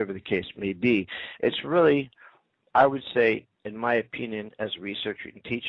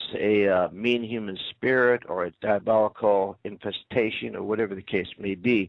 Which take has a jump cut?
first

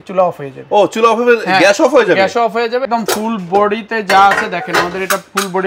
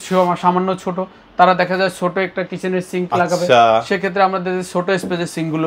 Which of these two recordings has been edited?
first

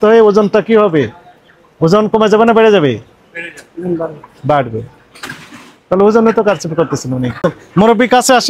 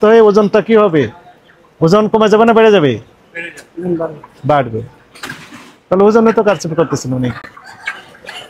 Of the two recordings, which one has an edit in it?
first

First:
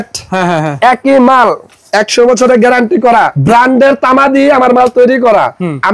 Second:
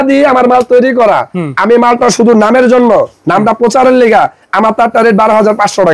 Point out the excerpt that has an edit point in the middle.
first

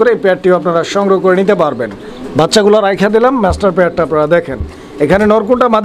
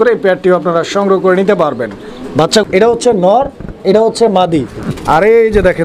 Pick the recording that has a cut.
second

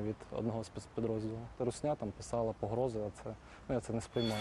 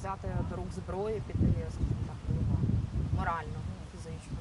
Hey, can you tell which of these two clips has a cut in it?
first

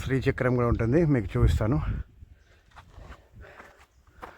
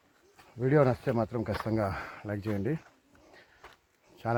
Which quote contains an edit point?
first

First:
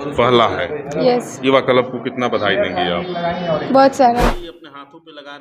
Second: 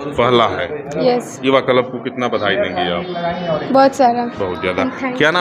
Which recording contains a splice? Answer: first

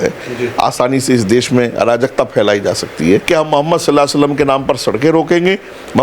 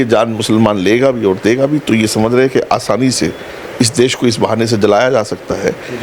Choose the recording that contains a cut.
first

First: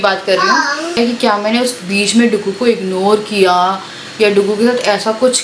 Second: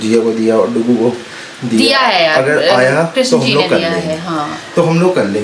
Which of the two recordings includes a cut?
first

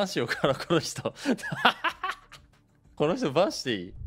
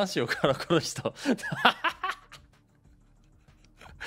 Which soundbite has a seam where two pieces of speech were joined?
first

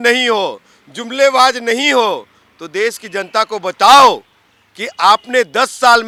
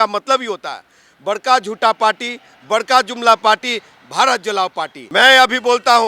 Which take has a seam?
second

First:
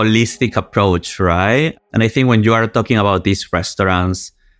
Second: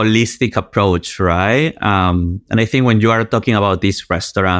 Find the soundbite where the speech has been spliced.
first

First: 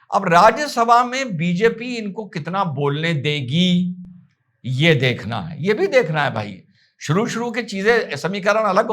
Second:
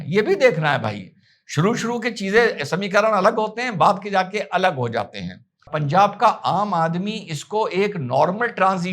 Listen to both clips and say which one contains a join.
second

